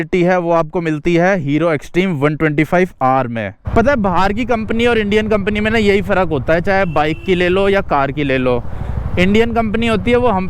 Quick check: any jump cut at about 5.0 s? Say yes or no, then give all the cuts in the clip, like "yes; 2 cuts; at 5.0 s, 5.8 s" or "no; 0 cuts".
no; 1 cut; at 3.6 s